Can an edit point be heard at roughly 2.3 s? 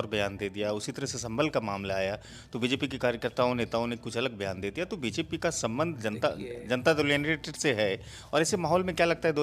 no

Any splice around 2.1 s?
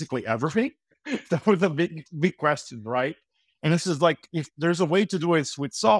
no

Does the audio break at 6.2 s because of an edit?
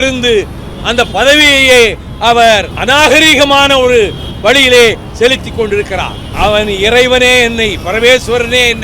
yes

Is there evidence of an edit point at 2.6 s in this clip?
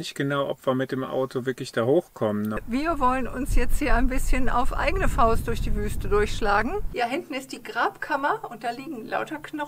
yes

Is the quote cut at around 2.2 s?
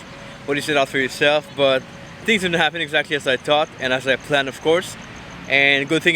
yes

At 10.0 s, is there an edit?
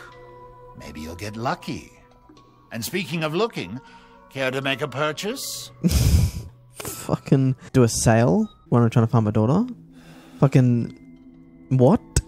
no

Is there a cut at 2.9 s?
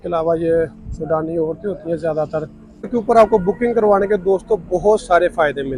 yes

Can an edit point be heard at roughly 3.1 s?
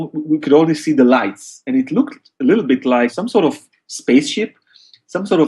yes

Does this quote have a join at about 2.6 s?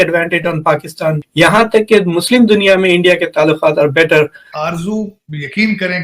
no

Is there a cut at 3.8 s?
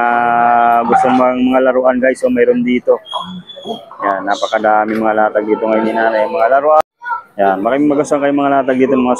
no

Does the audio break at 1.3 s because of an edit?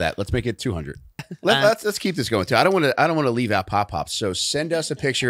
yes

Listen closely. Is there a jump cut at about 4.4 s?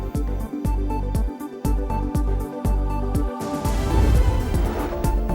yes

